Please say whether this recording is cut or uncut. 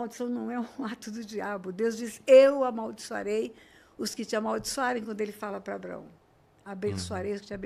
uncut